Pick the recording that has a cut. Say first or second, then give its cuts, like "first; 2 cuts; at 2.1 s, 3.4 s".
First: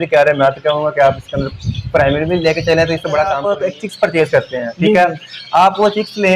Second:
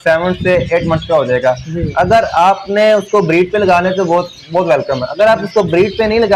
first; 1 cut; at 3.4 s